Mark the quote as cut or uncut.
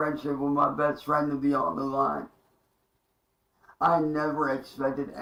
uncut